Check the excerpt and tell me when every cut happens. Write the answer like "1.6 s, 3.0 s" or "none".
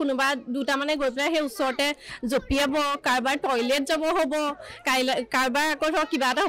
none